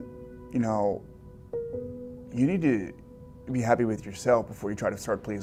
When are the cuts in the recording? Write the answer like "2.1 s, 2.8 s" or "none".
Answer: none